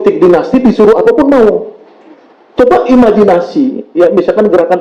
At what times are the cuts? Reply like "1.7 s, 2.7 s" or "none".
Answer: none